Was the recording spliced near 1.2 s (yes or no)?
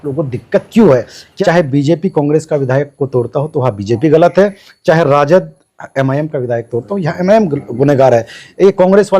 yes